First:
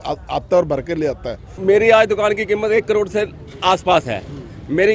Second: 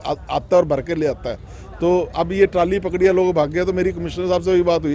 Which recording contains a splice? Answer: first; 1 cut; at 1.5 s

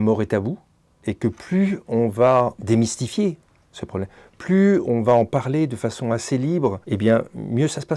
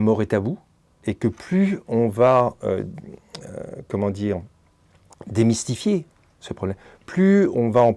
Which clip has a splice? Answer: first; 2 cuts; at 2.6 s, 6.8 s

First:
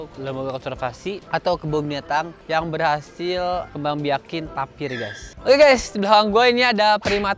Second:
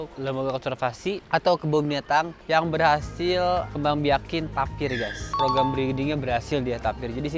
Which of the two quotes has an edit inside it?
first; 1 cut; at 5.2 s

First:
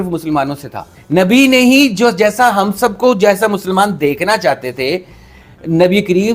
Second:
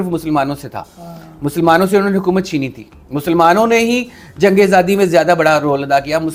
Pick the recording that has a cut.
first; 1 cut; at 0.9 s

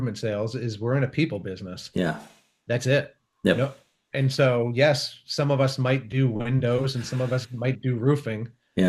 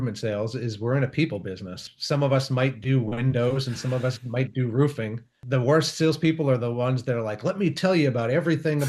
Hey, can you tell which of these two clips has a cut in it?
second; 2 cuts; at 1.8 s, 5.3 s

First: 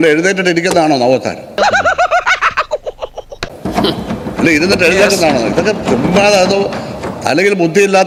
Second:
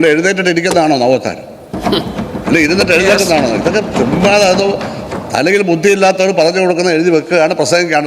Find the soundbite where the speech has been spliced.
second; 1 cut; at 1.4 s

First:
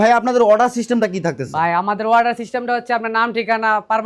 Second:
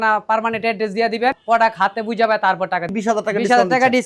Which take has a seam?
second; 2 cuts; at 1.4 s, 2.9 s

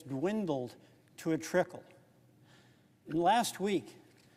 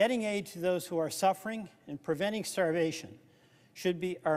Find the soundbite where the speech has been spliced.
first; 1 cut; at 3.1 s

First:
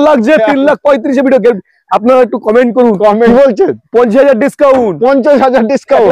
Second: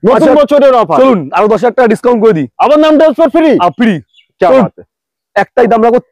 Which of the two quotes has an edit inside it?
first; 1 cut; at 3.3 s

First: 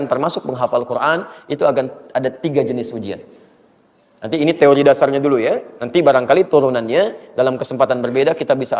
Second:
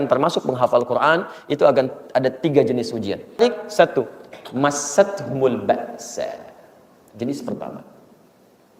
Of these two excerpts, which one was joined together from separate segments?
second; 1 cut; at 3.4 s

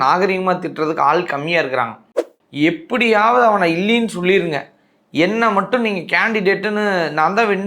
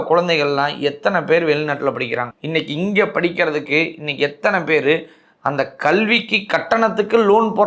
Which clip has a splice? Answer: first; 1 cut; at 2.2 s

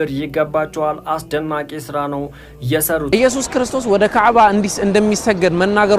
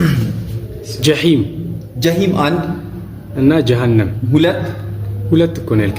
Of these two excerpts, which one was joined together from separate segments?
first; 1 cut; at 3.1 s

